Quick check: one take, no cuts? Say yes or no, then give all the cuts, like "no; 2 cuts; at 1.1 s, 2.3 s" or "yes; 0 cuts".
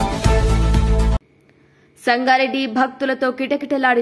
no; 1 cut; at 1.2 s